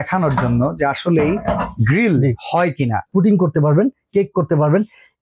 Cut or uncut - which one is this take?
cut